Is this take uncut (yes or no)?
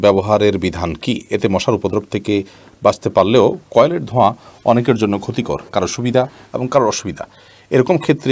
yes